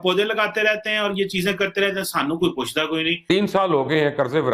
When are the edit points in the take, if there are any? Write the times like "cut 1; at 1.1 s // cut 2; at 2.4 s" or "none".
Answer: cut 1; at 3.2 s

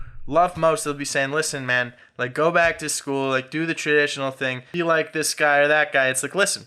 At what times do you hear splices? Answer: cut 1; at 4.6 s

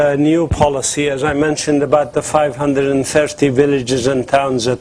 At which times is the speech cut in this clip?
none

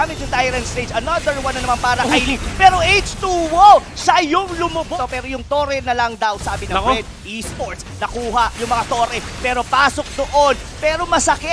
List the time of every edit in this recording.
cut 1; at 4.9 s

